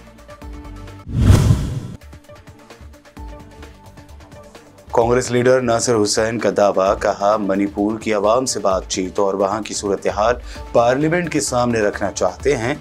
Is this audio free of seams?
yes; 0 cuts

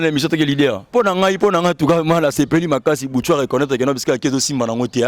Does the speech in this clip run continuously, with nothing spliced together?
no; 1 cut; at 0.9 s

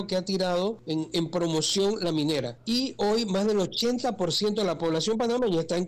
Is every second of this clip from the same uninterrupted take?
no; 2 cuts; at 0.8 s, 2.6 s

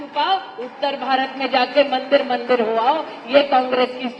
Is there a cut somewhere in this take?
no; 0 cuts

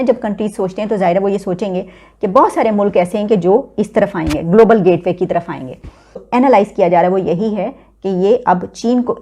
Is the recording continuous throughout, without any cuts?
no; 1 cut; at 6.2 s

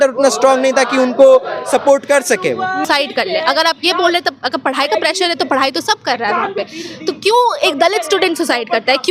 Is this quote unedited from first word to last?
no; 1 cut; at 2.8 s

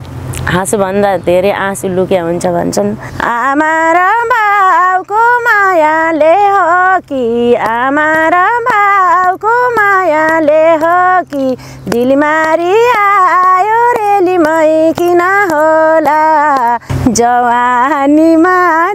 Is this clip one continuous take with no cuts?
no; 2 cuts; at 3.1 s, 16.9 s

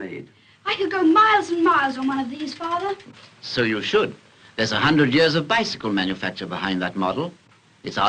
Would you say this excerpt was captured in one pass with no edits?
no; 1 cut; at 6.8 s

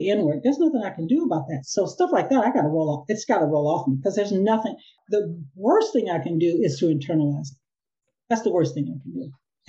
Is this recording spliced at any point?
yes; 1 cut; at 4.9 s

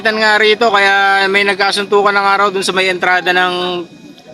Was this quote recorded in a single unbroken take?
yes; 0 cuts

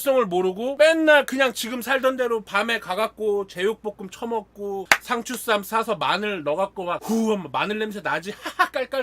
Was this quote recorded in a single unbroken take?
yes; 0 cuts

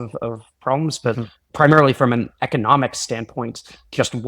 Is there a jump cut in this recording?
yes; 1 cut; at 1.4 s

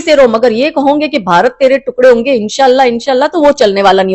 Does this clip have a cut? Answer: no; 0 cuts

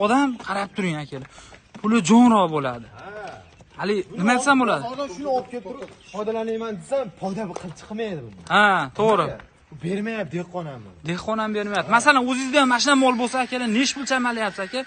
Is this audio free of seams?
yes; 0 cuts

